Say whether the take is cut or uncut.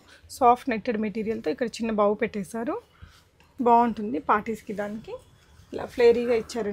uncut